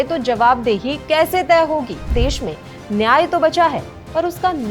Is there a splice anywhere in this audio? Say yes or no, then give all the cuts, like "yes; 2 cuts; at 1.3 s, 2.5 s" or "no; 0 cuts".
yes; 1 cut; at 2.1 s